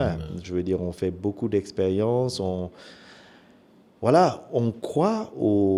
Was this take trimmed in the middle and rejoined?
no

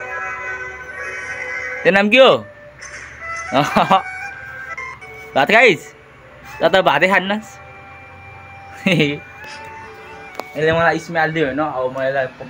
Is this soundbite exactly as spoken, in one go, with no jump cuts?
yes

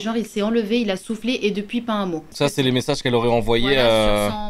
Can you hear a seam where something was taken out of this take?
no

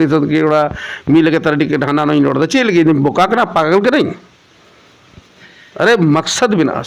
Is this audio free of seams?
yes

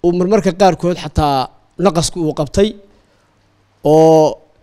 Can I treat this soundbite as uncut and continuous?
yes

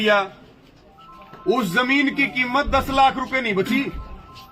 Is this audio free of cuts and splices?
yes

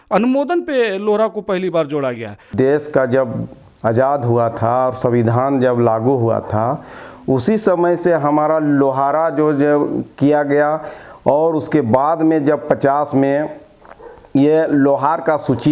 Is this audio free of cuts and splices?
no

